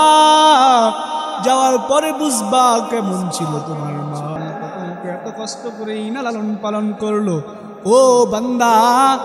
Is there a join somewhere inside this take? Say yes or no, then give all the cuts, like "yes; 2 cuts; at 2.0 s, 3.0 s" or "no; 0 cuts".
yes; 1 cut; at 4.4 s